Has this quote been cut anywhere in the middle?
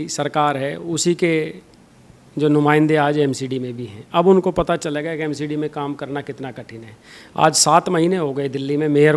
no; 0 cuts

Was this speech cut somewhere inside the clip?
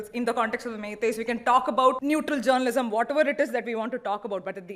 yes; 1 cut; at 2.0 s

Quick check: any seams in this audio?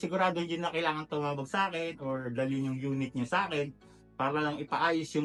no; 0 cuts

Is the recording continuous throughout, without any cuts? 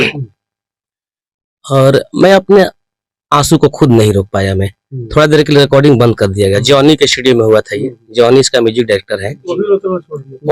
yes; 0 cuts

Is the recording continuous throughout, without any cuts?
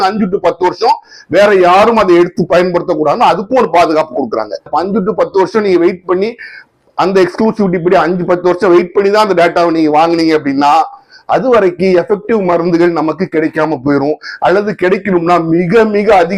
no; 1 cut; at 4.7 s

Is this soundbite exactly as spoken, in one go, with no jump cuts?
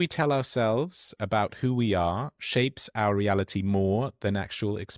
yes; 0 cuts

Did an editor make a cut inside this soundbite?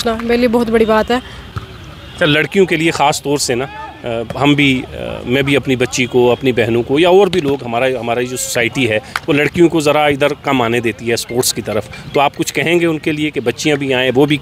no; 0 cuts

